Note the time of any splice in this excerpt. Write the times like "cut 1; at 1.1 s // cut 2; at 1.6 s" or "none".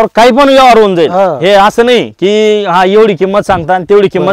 none